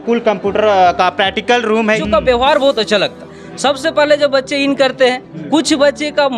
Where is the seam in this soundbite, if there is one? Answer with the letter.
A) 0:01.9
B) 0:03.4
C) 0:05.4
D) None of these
A